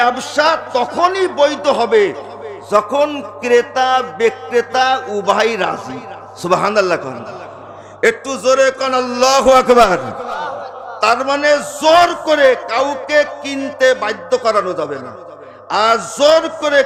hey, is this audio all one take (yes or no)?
yes